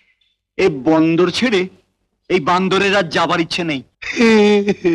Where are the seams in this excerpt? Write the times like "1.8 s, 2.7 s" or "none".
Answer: 4.0 s